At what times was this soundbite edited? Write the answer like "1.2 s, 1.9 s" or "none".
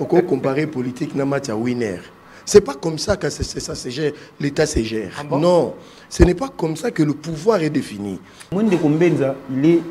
8.5 s